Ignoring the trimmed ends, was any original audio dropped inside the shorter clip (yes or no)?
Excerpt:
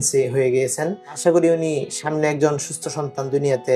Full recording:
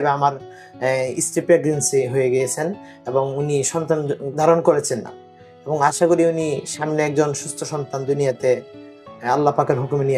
yes